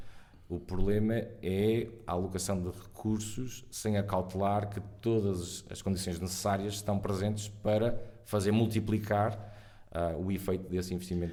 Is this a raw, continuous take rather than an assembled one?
yes; 0 cuts

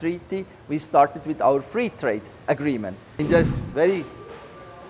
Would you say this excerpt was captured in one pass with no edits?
no; 1 cut; at 3.1 s

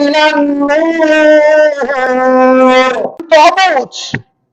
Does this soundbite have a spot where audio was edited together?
yes; 1 cut; at 3.2 s

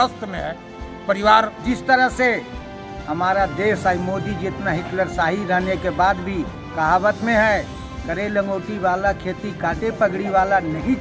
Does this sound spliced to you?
yes; 1 cut; at 1.5 s

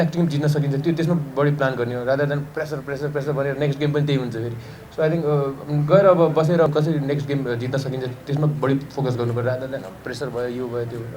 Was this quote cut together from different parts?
yes; 1 cut; at 6.7 s

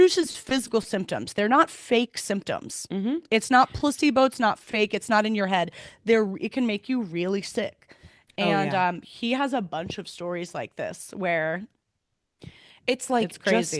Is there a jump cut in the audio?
no; 0 cuts

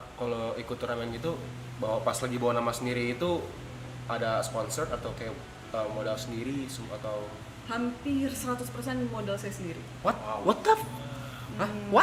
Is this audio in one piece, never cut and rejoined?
yes; 0 cuts

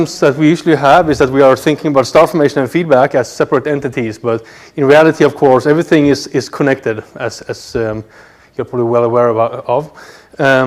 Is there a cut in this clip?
yes; 1 cut; at 3.6 s

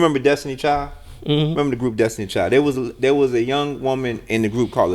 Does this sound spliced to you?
no; 0 cuts

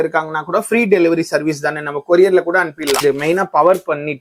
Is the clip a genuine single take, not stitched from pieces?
no; 1 cut; at 3.0 s

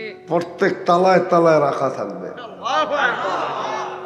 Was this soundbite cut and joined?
no; 0 cuts

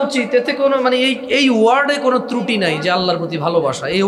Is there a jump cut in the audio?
no; 0 cuts

